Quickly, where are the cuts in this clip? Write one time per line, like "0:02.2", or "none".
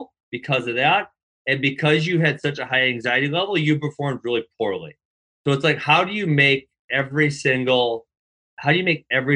0:06.8